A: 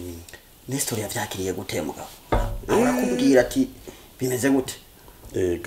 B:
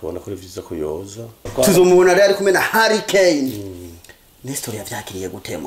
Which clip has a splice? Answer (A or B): B